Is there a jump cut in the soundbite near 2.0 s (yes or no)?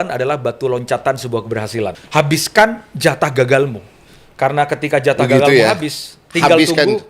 yes